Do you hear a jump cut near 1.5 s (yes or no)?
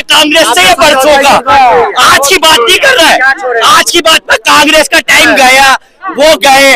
no